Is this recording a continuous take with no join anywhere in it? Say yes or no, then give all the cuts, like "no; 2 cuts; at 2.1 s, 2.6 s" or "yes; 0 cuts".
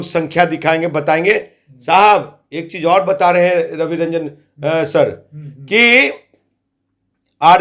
yes; 0 cuts